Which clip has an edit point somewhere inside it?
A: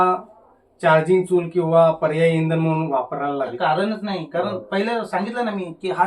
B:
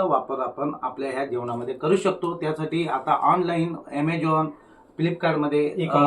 A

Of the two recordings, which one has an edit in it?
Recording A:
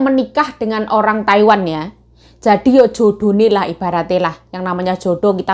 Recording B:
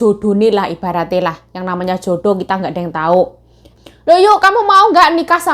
B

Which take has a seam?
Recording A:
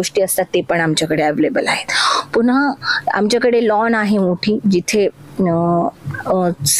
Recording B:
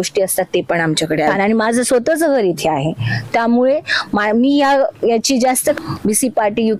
B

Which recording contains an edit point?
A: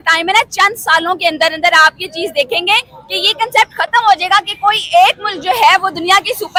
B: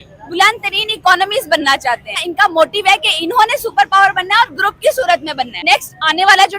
B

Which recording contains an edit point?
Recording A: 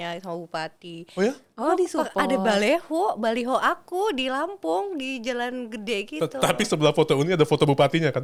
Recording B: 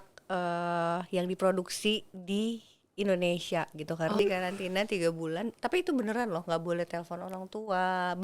B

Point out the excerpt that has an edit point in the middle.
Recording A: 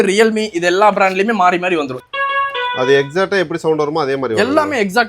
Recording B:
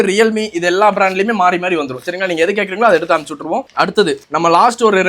A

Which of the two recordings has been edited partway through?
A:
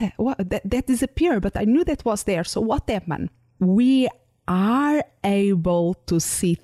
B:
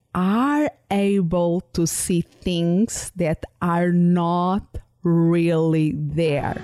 A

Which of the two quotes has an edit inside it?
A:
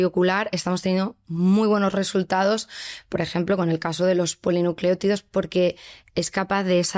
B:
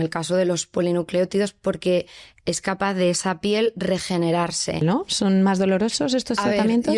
B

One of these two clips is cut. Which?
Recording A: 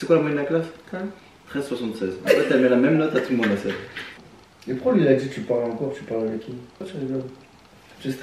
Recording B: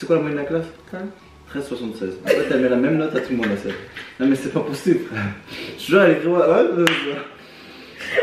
A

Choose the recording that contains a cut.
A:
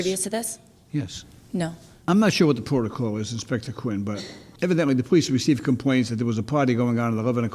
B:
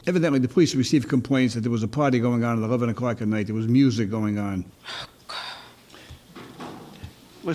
B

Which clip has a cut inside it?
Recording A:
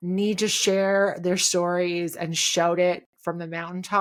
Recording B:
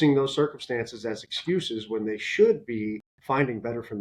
B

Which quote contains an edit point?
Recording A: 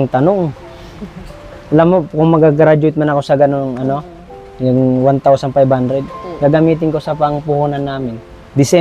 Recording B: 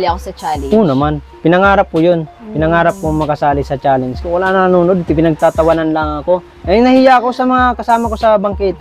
B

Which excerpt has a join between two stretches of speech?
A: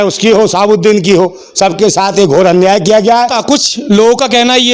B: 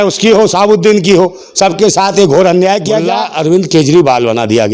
B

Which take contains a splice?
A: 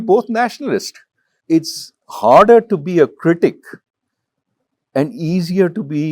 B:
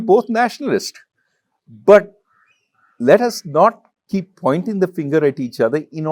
A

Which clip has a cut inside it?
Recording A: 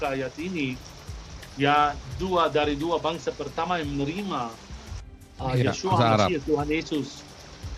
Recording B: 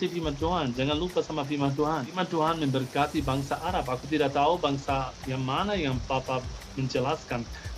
B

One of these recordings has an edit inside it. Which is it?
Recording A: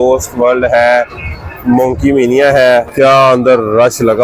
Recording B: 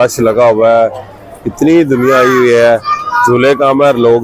A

